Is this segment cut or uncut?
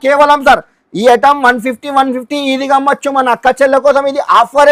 uncut